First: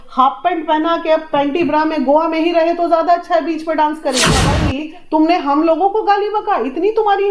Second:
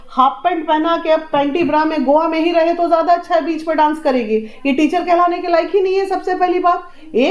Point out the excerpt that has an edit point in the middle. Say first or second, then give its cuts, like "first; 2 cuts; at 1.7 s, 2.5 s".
first; 1 cut; at 4.6 s